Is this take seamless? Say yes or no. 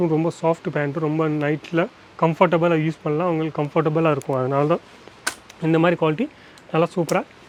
yes